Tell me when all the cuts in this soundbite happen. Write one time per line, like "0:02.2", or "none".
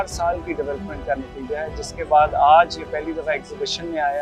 none

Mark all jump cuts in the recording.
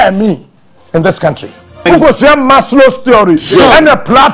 0:01.7

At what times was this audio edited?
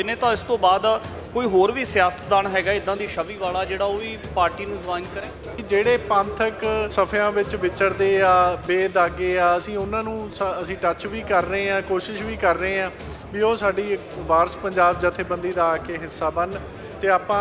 0:05.6
0:06.9

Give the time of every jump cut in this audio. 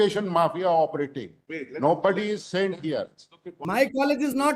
0:03.5

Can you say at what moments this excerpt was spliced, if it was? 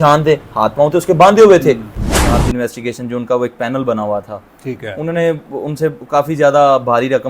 0:02.2

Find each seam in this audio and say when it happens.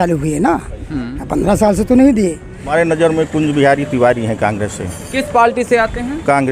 0:02.7

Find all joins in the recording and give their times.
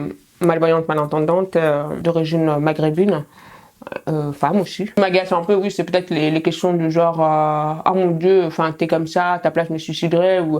0:02.0
0:04.8

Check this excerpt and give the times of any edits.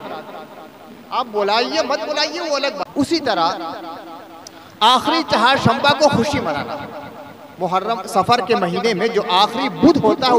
0:02.8

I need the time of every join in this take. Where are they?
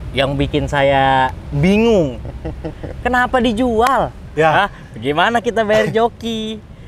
0:04.2

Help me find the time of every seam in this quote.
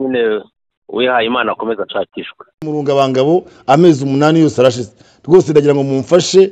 0:02.6

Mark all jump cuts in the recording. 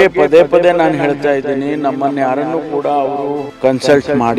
0:03.5

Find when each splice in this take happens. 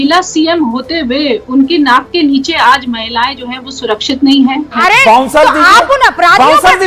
0:04.8

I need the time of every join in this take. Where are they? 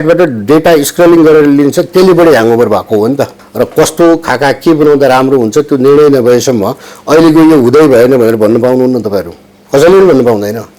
0:03.4

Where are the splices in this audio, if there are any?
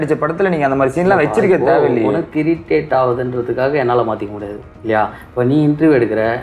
none

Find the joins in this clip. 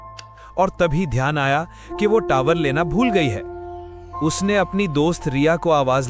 none

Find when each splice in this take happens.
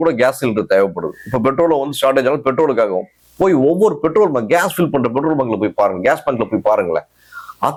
none

